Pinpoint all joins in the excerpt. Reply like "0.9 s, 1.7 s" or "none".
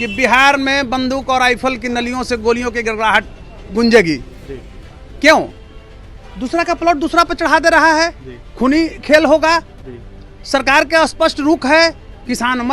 none